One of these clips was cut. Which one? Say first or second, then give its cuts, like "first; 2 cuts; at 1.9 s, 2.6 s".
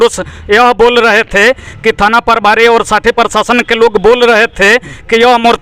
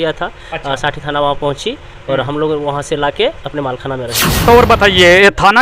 second; 1 cut; at 4.4 s